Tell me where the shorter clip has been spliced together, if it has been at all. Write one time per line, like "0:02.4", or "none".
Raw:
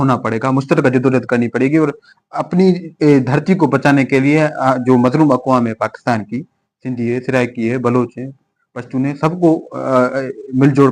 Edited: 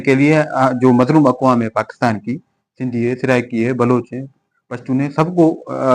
none

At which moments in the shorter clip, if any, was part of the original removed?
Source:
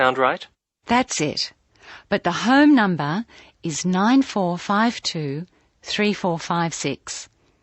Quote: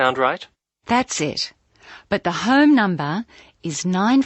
none

